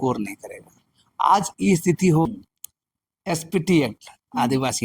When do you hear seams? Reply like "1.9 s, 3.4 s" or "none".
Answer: 2.3 s

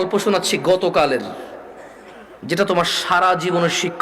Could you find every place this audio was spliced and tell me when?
none

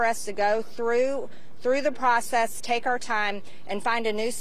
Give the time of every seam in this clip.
none

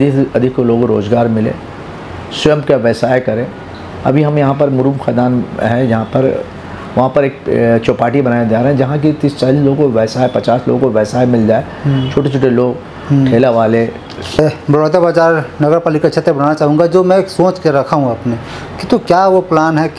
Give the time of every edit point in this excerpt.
14.4 s

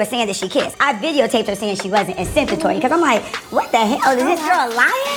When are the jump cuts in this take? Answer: none

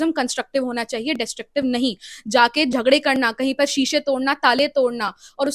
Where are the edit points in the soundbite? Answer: none

